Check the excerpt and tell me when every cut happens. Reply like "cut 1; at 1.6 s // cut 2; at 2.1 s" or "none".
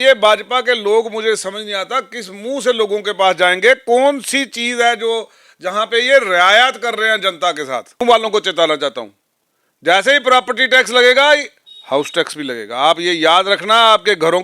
cut 1; at 8.0 s